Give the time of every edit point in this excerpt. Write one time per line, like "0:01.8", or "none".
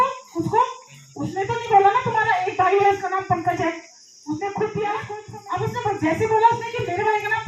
0:05.2